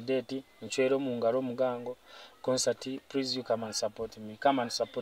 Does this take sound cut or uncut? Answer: uncut